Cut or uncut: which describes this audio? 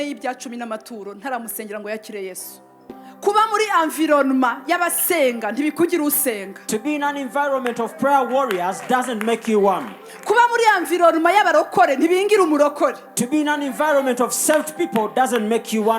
cut